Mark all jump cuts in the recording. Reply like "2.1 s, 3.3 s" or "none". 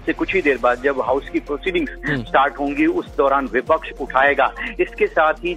3.0 s